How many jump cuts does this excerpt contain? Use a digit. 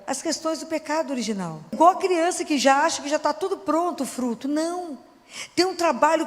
1